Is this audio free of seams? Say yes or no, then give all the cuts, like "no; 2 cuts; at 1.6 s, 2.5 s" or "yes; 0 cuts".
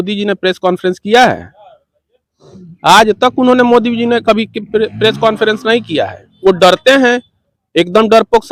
yes; 0 cuts